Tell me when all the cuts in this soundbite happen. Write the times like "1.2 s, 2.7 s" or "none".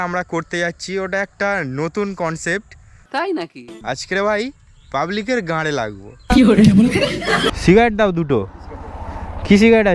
3.7 s, 7.6 s